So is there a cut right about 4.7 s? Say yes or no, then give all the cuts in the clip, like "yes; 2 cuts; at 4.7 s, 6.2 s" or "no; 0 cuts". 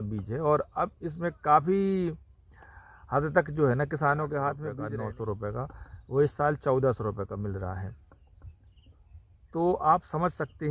yes; 1 cut; at 4.7 s